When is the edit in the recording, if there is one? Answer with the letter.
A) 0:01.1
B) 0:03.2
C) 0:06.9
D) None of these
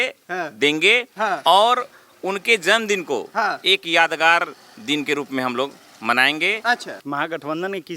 C